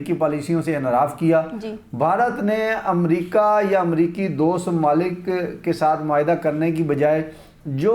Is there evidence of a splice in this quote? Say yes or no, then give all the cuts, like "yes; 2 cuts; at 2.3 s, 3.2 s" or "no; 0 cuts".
no; 0 cuts